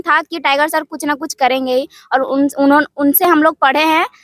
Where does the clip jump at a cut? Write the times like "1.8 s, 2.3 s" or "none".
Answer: none